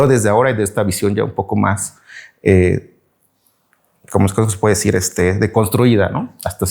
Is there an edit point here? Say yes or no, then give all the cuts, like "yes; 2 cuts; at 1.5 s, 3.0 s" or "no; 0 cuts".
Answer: no; 0 cuts